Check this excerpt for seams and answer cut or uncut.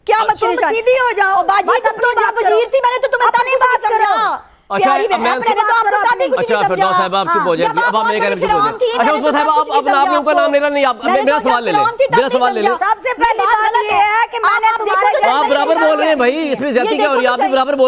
uncut